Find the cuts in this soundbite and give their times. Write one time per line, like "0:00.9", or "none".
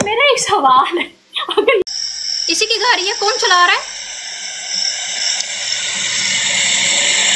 0:01.8